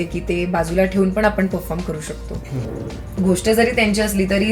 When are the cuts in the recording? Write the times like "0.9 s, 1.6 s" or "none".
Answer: 2.8 s